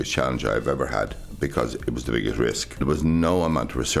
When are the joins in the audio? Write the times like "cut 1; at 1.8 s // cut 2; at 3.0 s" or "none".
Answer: cut 1; at 2.8 s